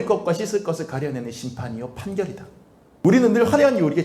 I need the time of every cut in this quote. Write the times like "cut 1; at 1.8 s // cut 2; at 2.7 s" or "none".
cut 1; at 3.0 s

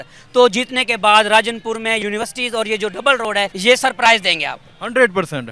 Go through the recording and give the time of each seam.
cut 1; at 2.0 s // cut 2; at 3.5 s

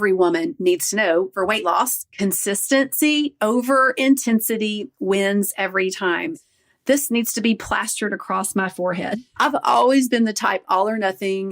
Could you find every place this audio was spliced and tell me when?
cut 1; at 1.3 s // cut 2; at 2.0 s // cut 3; at 6.3 s

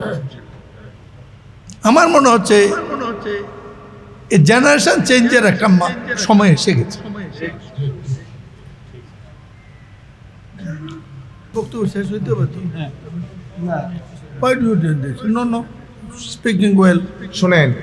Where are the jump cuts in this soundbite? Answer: cut 1; at 11.5 s

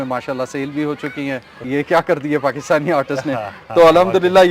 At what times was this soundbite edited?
cut 1; at 1.6 s

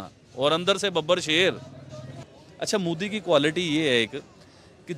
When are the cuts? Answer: cut 1; at 2.1 s

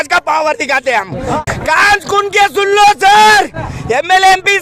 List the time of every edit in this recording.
cut 1; at 1.4 s

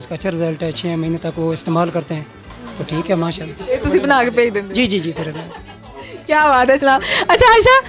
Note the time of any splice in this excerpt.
none

